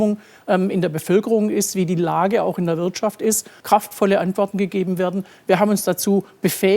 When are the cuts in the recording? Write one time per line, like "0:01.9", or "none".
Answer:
0:03.5